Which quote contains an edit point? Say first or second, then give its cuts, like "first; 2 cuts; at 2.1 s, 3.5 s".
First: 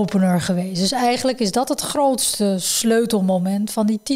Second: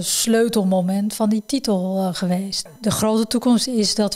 second; 1 cut; at 2.7 s